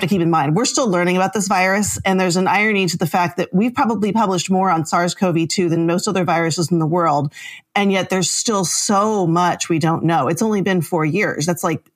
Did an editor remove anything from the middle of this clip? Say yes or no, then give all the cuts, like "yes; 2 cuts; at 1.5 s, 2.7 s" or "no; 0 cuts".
no; 0 cuts